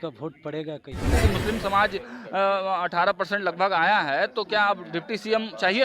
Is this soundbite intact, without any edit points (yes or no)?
no